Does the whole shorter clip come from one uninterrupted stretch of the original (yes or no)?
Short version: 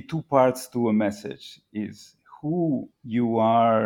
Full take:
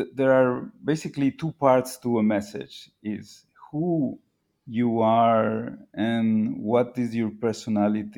no